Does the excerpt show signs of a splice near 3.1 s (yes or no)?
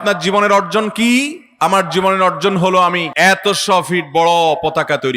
yes